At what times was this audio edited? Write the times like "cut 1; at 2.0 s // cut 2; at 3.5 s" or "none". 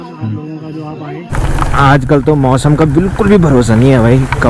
cut 1; at 1.3 s